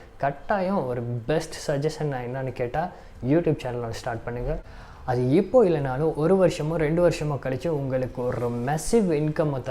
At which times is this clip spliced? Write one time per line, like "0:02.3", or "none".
0:04.6